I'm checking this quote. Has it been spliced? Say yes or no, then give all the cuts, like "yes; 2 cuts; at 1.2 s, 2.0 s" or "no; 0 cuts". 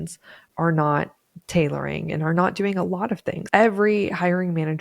yes; 1 cut; at 3.3 s